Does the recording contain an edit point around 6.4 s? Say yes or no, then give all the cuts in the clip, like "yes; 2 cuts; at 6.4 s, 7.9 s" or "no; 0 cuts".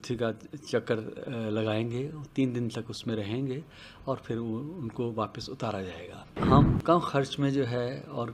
yes; 1 cut; at 6.4 s